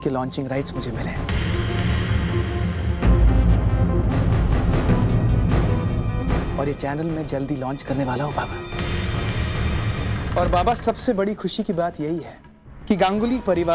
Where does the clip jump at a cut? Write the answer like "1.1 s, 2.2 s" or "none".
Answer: 10.2 s